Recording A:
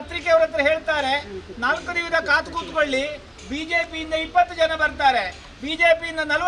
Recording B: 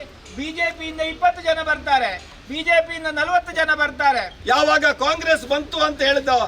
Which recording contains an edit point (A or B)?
B